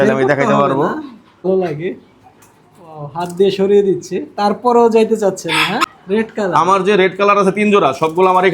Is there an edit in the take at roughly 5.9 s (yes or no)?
yes